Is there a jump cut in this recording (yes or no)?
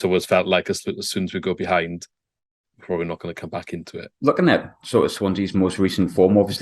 yes